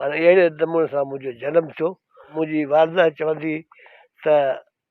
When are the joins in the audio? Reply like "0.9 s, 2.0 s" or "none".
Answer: 2.3 s